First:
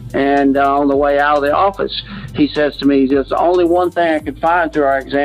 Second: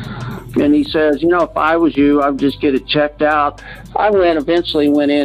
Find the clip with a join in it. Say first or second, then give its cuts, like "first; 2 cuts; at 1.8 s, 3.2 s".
second; 1 cut; at 3.6 s